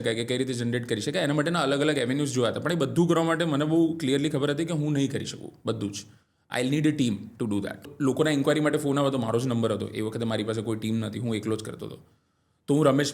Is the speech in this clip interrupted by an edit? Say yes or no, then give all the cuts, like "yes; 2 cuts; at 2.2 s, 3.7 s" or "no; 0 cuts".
yes; 1 cut; at 7.8 s